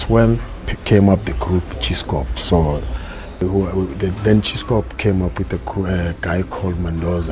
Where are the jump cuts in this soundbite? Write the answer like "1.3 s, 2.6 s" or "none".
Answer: 3.4 s